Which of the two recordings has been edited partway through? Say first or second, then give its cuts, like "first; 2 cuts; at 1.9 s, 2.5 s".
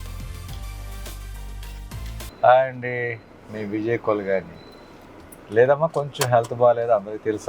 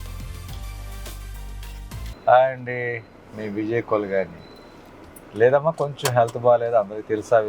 second; 1 cut; at 2.1 s